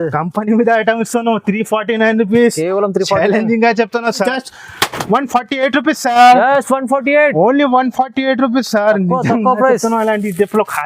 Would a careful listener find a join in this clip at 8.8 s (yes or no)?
no